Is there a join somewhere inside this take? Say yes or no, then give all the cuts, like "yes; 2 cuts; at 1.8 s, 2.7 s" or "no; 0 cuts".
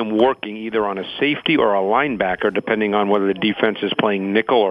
no; 0 cuts